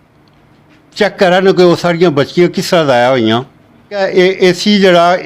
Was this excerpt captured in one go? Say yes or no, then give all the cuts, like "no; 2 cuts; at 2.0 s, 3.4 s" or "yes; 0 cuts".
no; 1 cut; at 4.0 s